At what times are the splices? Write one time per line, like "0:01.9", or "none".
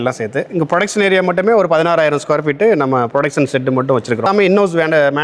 0:04.3